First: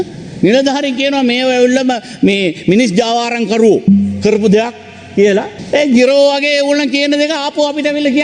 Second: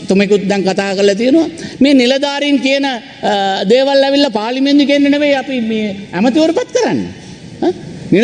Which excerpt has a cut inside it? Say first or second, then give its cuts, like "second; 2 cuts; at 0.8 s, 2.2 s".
first; 1 cut; at 5.6 s